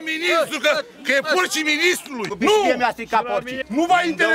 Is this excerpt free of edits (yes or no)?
no